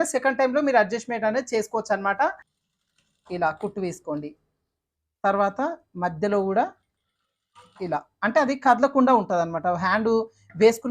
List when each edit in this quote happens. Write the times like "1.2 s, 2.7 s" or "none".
2.5 s